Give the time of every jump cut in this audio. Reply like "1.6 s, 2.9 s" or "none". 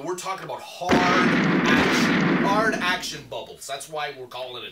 none